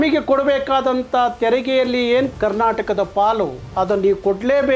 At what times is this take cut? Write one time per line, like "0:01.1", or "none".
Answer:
0:02.3